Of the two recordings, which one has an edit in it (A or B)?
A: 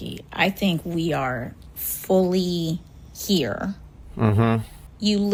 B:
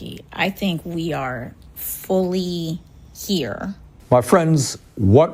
B